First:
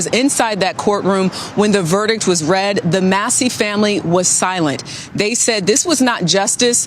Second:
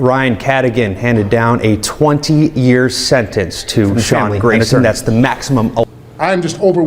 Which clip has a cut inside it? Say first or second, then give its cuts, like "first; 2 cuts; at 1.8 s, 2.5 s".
second; 1 cut; at 5.8 s